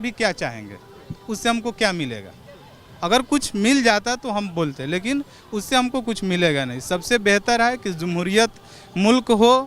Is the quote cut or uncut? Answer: uncut